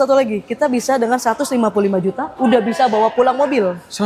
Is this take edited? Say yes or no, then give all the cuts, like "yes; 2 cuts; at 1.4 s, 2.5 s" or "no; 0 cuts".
no; 0 cuts